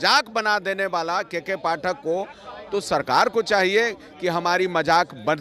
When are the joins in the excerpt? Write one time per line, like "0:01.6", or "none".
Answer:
none